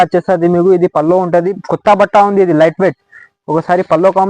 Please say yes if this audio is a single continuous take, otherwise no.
no